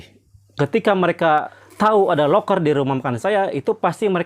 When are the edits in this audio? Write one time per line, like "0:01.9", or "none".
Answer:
0:01.6